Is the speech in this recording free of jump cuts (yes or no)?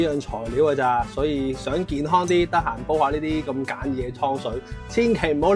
yes